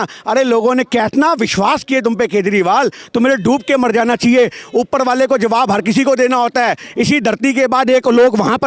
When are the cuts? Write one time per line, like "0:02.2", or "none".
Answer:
none

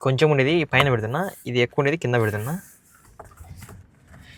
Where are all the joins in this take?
none

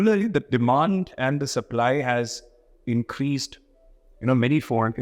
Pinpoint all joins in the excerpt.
none

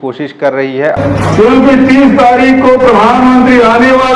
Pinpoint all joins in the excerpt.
0:01.0

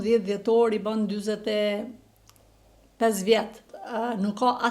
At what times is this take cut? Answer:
0:03.8

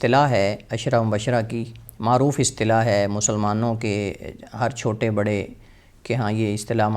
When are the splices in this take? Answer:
none

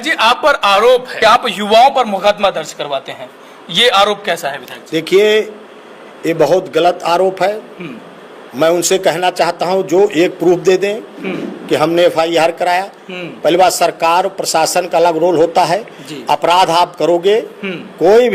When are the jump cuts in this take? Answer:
0:01.1

